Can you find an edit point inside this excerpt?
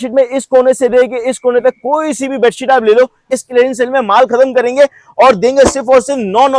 yes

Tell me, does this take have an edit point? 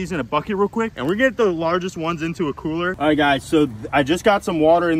no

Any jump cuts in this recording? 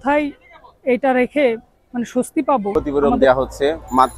yes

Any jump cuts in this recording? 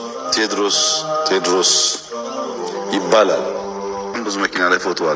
yes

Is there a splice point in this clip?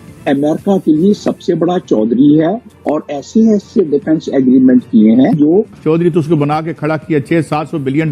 yes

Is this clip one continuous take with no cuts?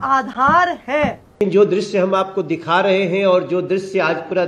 no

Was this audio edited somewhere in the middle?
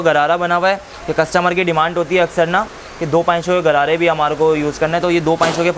no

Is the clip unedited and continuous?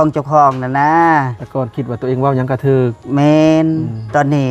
no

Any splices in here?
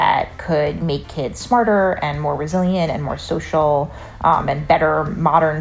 no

